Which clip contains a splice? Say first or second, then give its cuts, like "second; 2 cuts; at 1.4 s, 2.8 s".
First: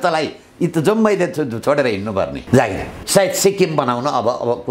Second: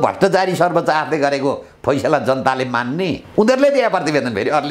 first; 1 cut; at 2.9 s